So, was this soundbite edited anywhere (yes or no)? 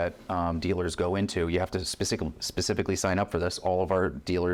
no